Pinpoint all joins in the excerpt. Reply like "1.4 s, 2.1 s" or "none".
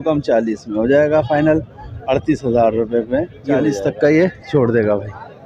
3.7 s

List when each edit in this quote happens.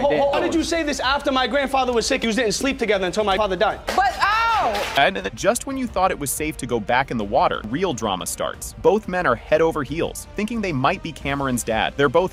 none

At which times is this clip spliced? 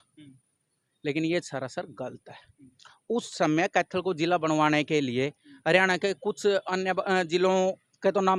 none

